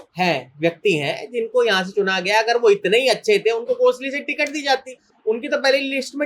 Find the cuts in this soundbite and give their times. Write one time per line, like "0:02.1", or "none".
none